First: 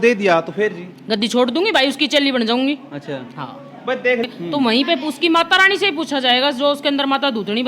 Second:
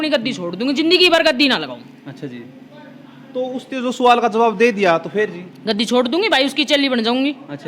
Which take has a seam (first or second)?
first